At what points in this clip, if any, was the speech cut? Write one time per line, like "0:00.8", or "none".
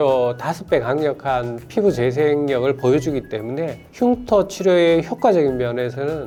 none